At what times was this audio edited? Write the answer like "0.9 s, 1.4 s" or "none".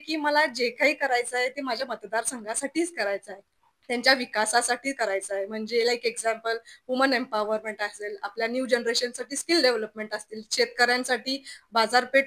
none